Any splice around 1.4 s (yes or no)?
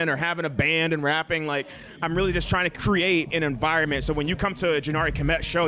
no